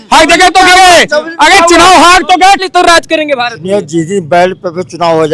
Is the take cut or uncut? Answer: cut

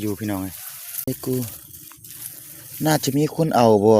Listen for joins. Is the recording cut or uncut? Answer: cut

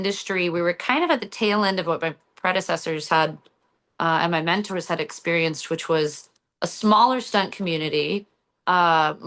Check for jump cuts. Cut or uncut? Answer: uncut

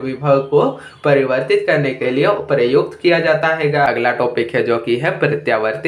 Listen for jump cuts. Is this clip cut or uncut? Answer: cut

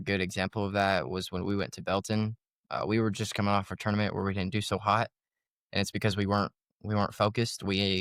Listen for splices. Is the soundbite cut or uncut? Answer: uncut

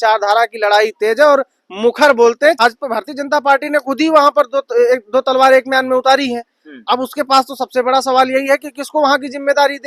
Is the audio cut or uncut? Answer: cut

